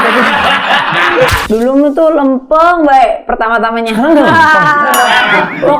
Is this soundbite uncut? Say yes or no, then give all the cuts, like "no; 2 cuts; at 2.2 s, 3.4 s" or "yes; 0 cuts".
no; 1 cut; at 1.4 s